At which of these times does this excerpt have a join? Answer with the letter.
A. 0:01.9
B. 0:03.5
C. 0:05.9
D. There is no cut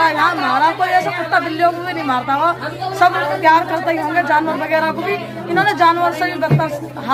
D